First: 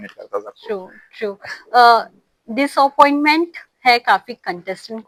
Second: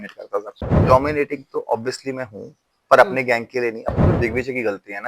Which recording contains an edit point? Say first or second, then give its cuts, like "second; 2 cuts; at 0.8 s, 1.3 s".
second; 2 cuts; at 0.7 s, 4.1 s